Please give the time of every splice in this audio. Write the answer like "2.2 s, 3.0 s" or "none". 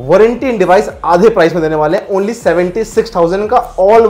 none